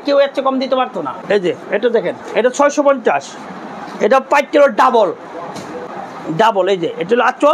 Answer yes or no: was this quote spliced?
no